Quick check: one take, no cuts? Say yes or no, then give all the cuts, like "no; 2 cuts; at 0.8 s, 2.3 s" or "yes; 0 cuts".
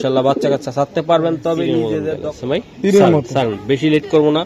no; 1 cut; at 2.6 s